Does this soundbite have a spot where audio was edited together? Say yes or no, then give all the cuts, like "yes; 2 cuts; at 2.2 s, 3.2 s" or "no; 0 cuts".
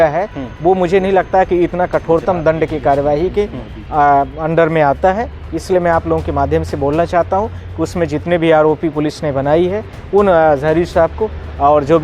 no; 0 cuts